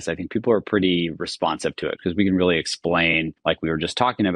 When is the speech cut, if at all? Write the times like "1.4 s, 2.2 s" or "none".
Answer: 2.0 s, 3.3 s